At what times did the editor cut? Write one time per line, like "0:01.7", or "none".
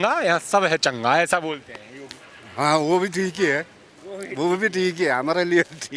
none